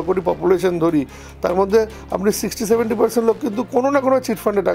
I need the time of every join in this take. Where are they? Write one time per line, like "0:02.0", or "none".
none